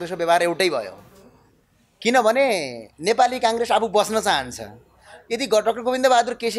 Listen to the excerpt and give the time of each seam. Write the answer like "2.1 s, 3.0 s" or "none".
none